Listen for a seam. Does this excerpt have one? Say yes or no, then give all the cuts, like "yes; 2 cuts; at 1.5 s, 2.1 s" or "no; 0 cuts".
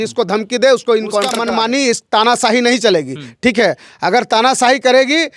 yes; 1 cut; at 1.4 s